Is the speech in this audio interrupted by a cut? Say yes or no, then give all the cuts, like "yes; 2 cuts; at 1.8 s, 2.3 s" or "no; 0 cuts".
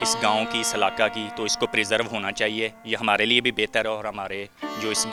no; 0 cuts